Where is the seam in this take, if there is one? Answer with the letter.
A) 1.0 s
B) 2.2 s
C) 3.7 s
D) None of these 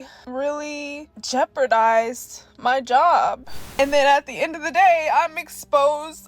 C